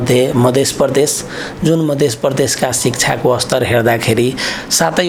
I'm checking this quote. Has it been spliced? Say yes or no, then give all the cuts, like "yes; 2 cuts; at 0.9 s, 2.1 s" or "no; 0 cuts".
no; 0 cuts